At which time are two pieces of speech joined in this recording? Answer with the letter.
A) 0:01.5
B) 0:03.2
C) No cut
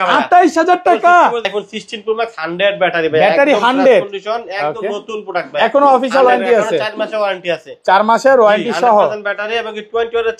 A